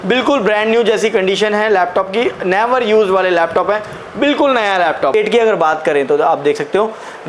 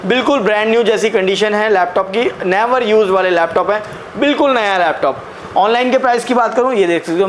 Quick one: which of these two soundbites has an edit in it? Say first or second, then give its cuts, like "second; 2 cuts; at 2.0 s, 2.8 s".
first; 1 cut; at 5.1 s